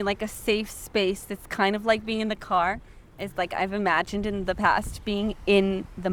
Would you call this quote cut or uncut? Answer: uncut